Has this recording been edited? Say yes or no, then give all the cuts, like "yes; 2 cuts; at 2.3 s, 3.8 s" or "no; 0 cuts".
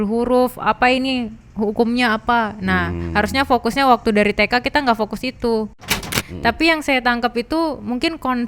yes; 1 cut; at 5.8 s